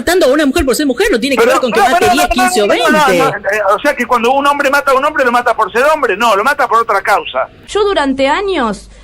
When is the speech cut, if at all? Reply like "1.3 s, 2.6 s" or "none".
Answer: 7.6 s

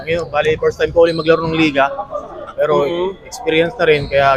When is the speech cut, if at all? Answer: none

